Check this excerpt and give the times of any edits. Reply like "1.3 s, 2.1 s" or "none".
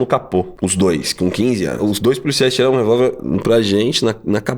1.7 s